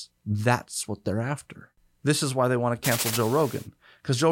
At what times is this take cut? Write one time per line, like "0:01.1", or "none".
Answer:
0:01.6